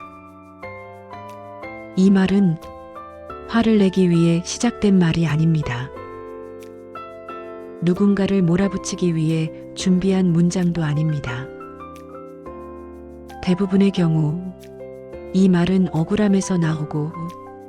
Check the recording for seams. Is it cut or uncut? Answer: cut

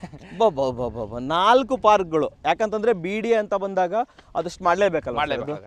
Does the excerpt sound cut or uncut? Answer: uncut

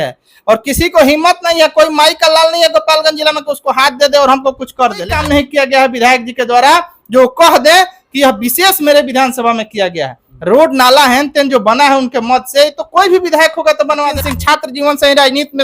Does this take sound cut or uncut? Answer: cut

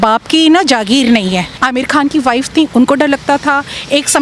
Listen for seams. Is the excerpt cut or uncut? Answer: cut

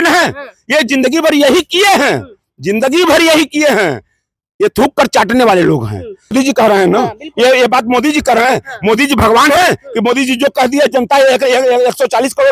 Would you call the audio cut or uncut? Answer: cut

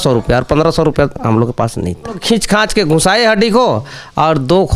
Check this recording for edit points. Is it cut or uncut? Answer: cut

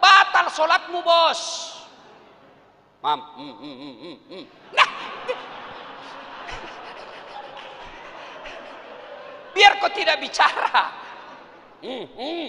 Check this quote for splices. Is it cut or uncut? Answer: uncut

